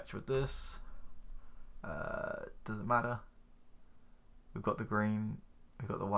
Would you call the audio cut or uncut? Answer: uncut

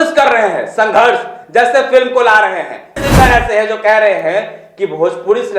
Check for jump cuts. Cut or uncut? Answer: cut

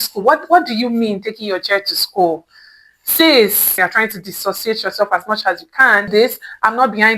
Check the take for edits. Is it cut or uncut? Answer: cut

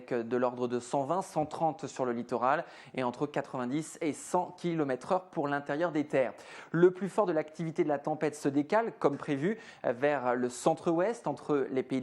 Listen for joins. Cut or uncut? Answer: cut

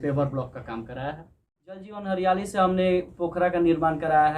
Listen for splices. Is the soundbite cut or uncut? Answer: cut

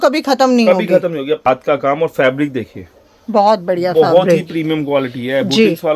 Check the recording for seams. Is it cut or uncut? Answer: cut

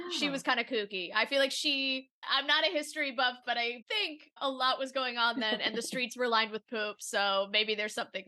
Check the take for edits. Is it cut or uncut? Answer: cut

